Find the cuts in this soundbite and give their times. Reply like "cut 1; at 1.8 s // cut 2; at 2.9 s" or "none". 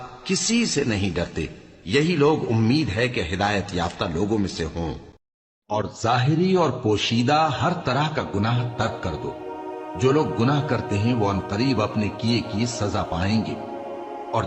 cut 1; at 5.8 s

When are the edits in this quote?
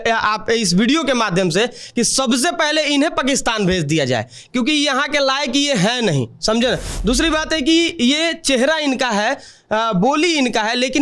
none

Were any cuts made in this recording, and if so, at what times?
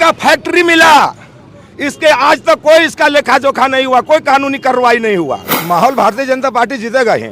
cut 1; at 5.5 s

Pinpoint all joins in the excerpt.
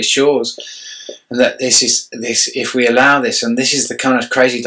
none

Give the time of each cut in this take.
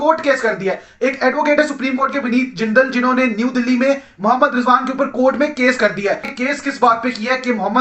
cut 1; at 6.3 s

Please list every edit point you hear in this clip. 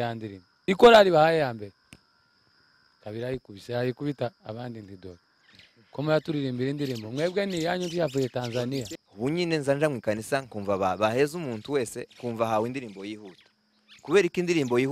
cut 1; at 8.9 s

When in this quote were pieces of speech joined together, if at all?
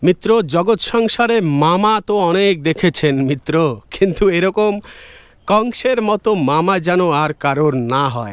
none

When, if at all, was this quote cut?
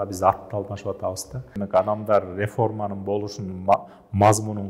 cut 1; at 1.6 s

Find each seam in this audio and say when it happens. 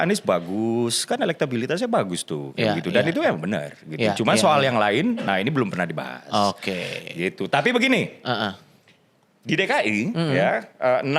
none

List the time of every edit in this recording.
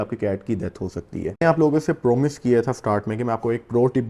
cut 1; at 1.4 s

